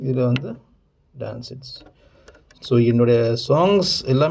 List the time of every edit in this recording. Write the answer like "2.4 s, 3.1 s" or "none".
2.6 s